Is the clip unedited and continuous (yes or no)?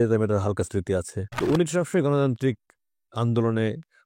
no